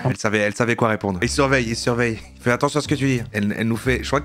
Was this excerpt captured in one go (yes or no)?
no